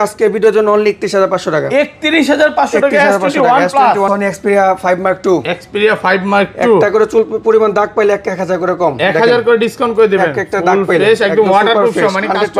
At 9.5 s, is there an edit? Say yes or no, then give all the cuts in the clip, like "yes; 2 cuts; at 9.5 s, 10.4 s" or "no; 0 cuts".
no; 1 cut; at 4.1 s